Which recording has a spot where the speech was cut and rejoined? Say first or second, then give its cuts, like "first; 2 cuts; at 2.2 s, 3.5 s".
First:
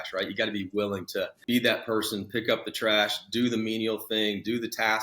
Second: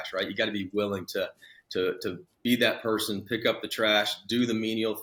first; 1 cut; at 1.4 s